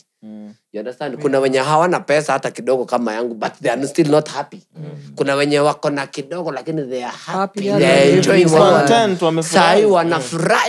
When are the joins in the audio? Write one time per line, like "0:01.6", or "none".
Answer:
none